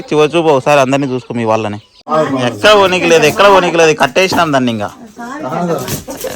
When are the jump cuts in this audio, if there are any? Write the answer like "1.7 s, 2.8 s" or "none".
2.1 s